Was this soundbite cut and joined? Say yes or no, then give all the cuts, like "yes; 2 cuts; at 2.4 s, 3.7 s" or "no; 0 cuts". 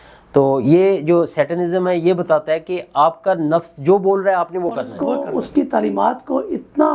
yes; 1 cut; at 5.2 s